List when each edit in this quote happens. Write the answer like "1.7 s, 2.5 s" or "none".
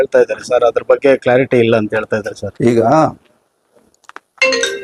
none